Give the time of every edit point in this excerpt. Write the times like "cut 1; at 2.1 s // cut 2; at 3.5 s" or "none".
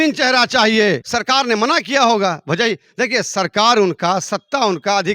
cut 1; at 1.1 s

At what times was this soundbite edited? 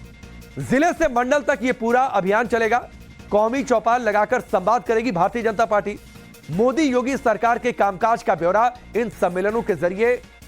cut 1; at 9.4 s

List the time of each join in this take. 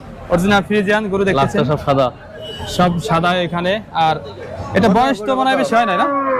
none

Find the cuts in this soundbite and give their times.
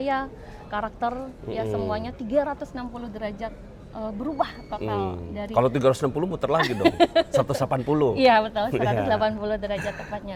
none

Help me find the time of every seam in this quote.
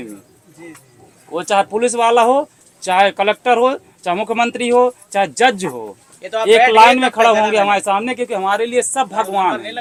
none

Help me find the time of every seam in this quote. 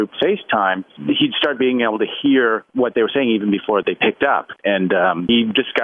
cut 1; at 4.6 s

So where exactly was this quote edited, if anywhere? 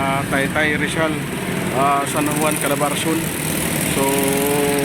none

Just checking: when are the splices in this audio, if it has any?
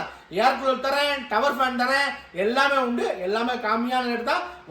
none

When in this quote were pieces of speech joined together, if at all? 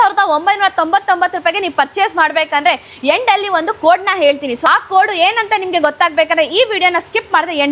none

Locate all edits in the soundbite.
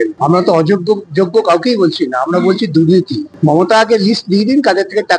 cut 1; at 3.2 s

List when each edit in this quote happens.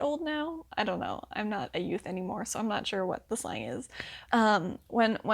cut 1; at 4.2 s

